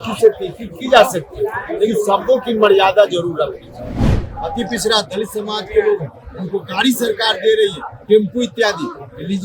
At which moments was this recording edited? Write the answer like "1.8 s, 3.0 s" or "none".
4.2 s